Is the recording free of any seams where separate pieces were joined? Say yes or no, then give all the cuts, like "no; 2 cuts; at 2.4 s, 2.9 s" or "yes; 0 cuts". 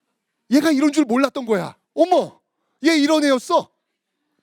no; 1 cut; at 1.8 s